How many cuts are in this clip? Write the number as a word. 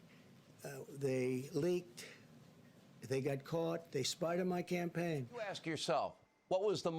one